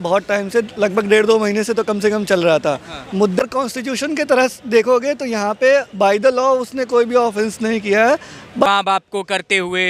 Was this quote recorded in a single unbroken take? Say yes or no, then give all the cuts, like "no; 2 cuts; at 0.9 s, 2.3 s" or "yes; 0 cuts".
no; 2 cuts; at 3.4 s, 8.6 s